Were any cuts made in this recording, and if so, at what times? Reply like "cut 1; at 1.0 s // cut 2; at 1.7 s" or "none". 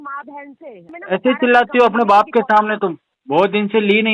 cut 1; at 0.9 s // cut 2; at 3.1 s